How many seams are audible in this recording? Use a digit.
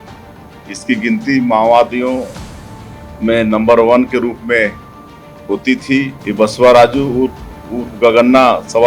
1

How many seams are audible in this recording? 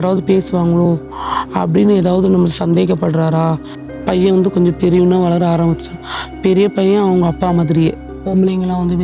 2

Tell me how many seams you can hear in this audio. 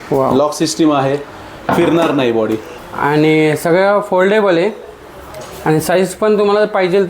1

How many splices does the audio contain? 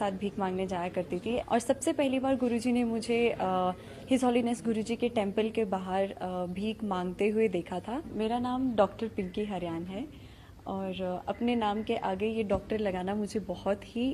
2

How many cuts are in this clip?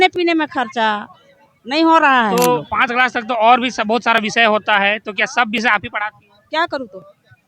1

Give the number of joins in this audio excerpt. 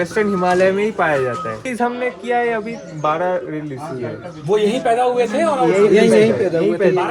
1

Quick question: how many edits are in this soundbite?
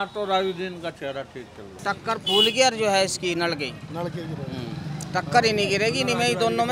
1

